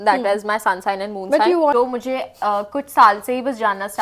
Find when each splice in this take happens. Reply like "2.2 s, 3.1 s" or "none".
1.7 s